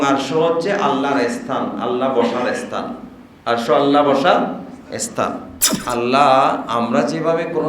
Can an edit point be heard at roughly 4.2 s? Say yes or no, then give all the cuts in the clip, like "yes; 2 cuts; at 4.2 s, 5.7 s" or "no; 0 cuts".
no; 1 cut; at 5.7 s